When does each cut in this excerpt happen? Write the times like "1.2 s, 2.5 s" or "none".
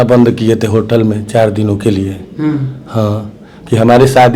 none